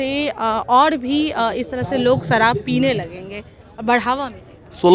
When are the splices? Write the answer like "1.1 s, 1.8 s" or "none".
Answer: none